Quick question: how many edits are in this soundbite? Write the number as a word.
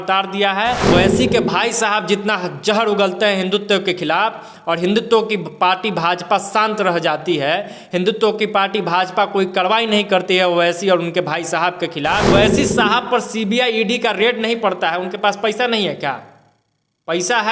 two